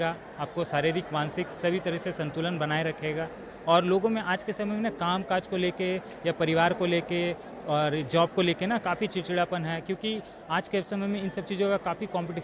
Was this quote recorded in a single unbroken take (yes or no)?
yes